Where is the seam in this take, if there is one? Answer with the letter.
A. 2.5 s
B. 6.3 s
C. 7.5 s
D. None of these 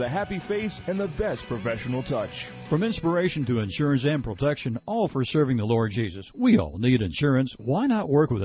A